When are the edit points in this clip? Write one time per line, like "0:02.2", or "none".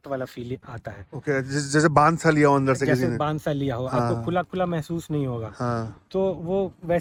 none